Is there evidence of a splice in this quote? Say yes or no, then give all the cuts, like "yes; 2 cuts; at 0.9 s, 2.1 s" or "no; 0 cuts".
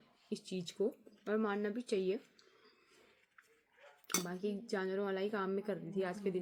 no; 0 cuts